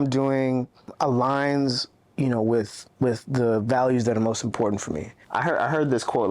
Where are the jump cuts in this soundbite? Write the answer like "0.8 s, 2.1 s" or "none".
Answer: 0.9 s, 5.1 s